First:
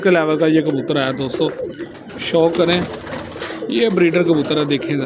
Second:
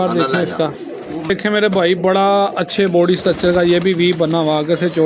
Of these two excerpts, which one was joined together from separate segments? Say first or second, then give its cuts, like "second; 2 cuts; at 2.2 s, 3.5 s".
second; 1 cut; at 1.3 s